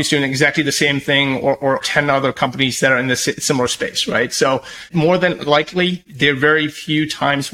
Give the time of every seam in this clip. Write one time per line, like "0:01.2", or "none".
0:01.8
0:04.8
0:06.0